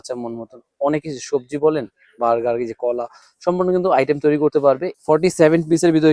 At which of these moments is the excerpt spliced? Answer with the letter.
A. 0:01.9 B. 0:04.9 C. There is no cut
B